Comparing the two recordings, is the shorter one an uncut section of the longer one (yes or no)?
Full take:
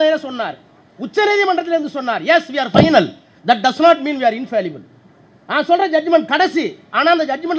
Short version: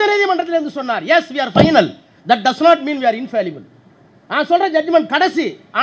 yes